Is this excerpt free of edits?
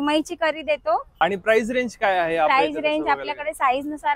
no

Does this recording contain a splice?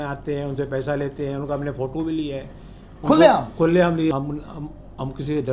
yes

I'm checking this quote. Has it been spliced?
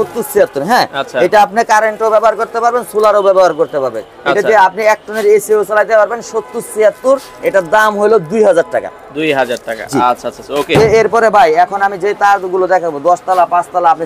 no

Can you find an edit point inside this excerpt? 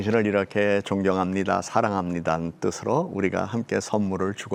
no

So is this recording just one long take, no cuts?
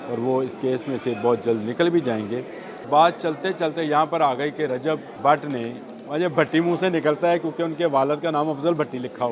no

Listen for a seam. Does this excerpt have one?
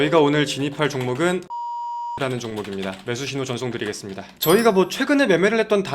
yes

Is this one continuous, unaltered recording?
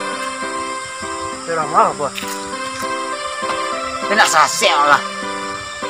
no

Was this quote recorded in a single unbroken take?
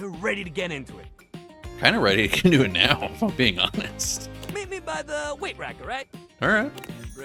yes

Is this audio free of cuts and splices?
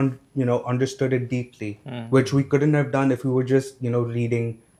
yes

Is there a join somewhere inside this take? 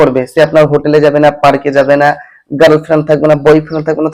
no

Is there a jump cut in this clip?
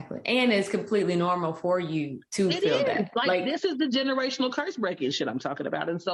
no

